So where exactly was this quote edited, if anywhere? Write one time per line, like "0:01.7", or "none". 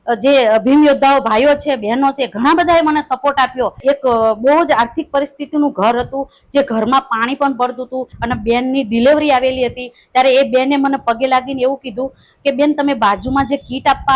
0:03.8
0:08.1